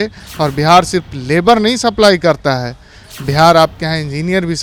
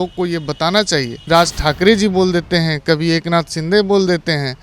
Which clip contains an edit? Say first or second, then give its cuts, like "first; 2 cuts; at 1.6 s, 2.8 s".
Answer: second; 1 cut; at 1.3 s